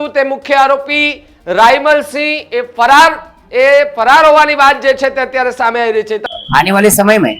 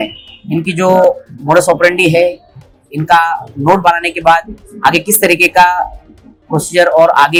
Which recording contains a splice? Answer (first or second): first